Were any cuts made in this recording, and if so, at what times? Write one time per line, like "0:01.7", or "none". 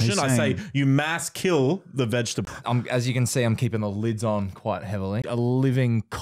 0:02.4
0:05.2